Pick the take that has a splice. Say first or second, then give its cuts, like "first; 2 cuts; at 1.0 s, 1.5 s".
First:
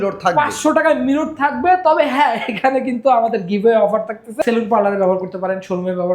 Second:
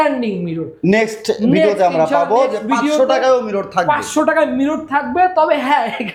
first; 1 cut; at 4.4 s